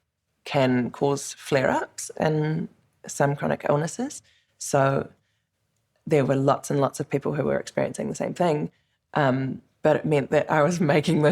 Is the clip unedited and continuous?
no; 1 cut; at 9.6 s

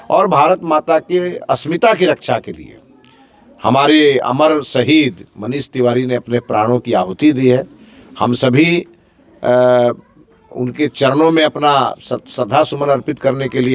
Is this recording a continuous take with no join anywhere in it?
yes; 0 cuts

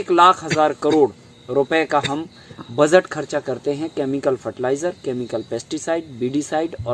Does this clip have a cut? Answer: no; 0 cuts

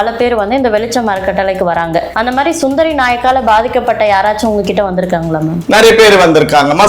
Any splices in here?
yes; 1 cut; at 2.1 s

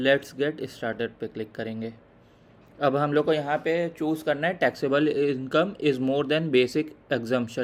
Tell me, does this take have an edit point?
no; 0 cuts

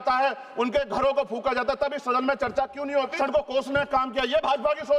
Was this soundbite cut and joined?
yes; 1 cut; at 3.1 s

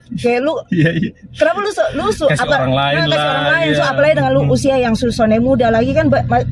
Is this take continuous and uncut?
yes; 0 cuts

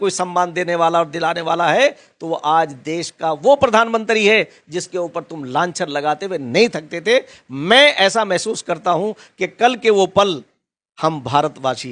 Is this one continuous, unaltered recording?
yes; 0 cuts

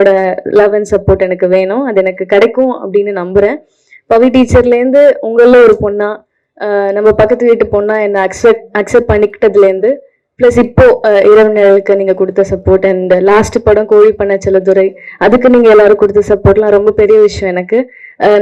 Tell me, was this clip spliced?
no; 0 cuts

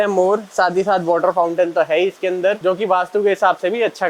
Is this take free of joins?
no; 1 cut; at 2.6 s

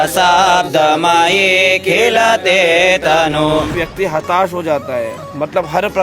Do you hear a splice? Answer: yes; 1 cut; at 3.8 s

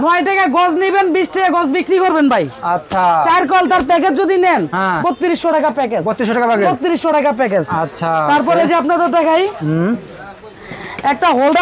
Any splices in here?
no; 0 cuts

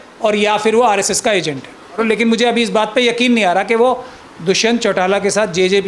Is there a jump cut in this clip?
yes; 1 cut; at 2.0 s

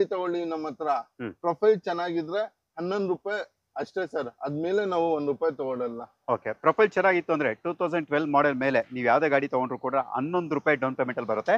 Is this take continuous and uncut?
yes; 0 cuts

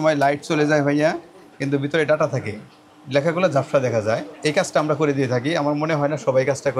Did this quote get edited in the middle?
no; 0 cuts

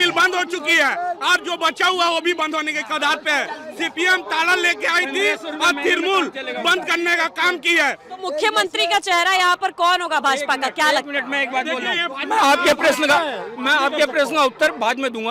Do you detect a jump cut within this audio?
no; 0 cuts

